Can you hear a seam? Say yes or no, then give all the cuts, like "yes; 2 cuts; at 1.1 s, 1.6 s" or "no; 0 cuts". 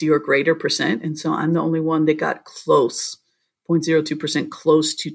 no; 0 cuts